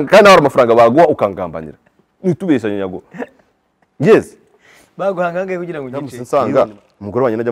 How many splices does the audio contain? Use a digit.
1